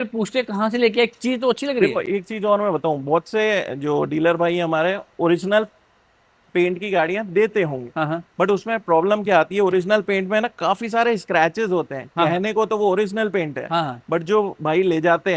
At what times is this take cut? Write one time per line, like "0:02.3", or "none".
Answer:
none